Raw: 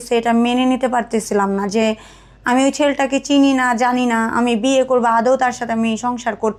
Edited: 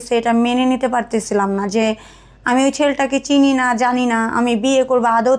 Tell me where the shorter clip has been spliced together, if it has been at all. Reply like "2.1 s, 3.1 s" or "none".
none